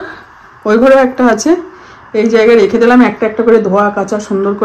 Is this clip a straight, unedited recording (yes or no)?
yes